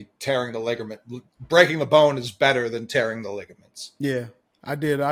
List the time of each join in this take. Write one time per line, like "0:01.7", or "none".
none

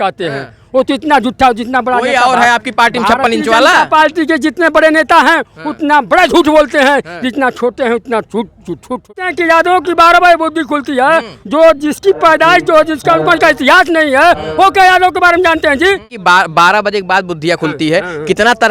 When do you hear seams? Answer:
0:09.1
0:16.1

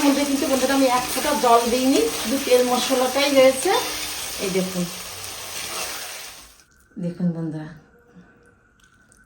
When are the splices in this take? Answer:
0:06.2

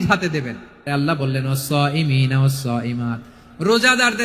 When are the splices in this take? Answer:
0:00.9

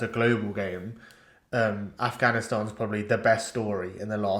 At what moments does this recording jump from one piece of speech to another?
none

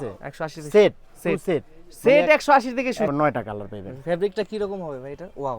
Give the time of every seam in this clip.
0:03.1

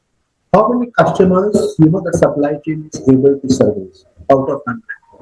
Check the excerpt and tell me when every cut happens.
none

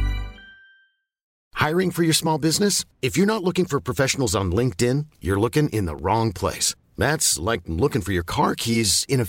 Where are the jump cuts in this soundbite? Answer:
0:01.4

